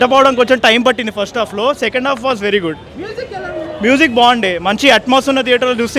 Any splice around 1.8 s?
no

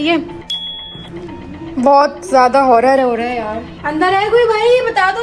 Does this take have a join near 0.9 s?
no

